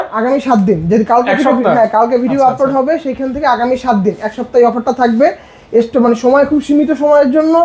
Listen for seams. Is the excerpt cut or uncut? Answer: uncut